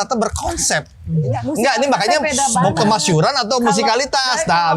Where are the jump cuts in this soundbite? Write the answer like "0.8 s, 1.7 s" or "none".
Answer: 1.0 s

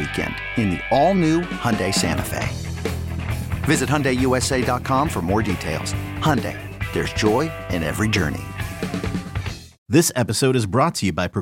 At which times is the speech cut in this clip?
9.8 s

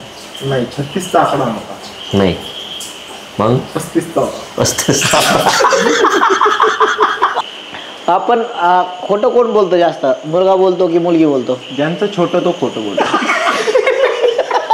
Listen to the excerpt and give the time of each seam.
7.4 s

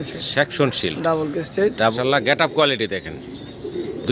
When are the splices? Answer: 2.0 s

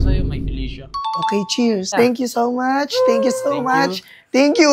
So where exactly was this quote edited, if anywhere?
1.9 s

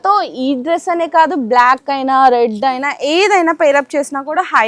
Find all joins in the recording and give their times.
none

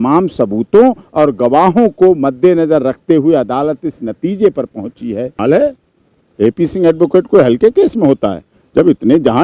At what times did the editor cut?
5.3 s

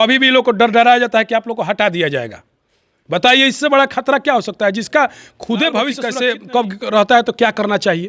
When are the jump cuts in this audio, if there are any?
6.0 s

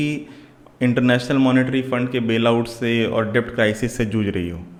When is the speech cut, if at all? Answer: none

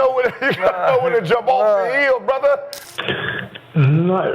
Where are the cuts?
2.8 s

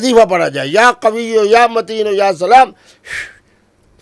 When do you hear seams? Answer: none

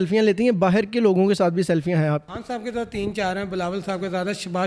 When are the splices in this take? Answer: 2.3 s

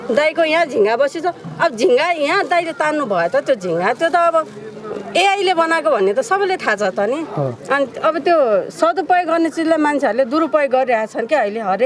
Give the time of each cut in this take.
none

